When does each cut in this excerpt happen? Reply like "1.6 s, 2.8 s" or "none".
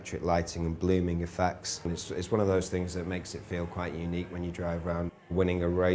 none